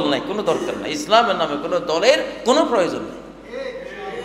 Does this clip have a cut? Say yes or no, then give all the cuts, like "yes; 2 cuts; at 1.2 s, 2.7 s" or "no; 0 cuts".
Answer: no; 0 cuts